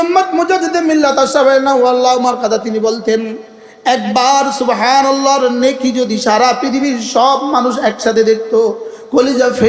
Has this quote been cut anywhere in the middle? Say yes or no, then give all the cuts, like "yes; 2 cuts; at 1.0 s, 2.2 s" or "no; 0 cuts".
no; 0 cuts